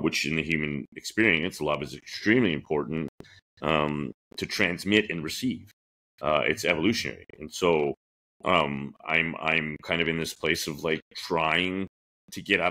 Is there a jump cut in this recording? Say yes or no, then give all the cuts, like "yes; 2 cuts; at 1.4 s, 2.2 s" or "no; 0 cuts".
no; 0 cuts